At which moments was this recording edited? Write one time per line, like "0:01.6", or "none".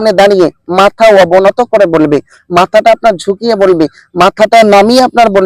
none